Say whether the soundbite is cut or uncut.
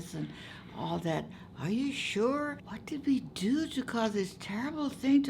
cut